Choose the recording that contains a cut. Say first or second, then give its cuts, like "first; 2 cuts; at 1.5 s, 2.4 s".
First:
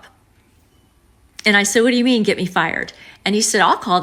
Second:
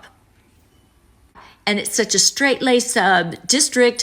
second; 1 cut; at 1.4 s